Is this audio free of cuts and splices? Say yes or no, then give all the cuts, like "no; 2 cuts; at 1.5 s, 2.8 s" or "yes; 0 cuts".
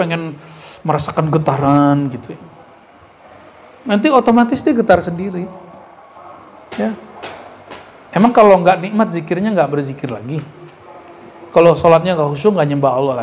yes; 0 cuts